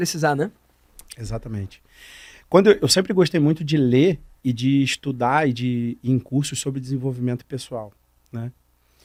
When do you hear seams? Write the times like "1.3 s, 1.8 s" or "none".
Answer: none